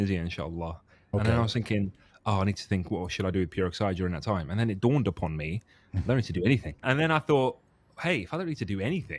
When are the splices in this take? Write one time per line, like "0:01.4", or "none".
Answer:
0:01.0
0:06.8